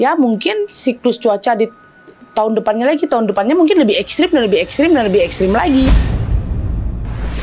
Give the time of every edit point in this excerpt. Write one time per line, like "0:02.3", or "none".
0:05.9